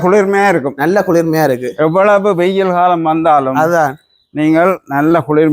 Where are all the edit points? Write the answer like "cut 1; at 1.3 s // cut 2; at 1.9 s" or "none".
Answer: none